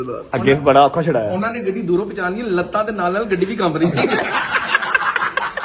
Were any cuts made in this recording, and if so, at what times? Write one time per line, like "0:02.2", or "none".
0:04.3